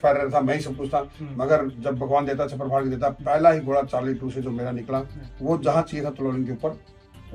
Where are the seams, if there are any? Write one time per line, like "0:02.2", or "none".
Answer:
none